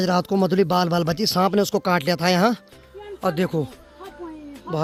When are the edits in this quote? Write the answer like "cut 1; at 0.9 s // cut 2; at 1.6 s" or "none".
none